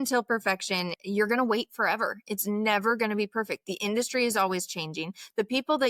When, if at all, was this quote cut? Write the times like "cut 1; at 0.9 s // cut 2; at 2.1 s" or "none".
cut 1; at 1.0 s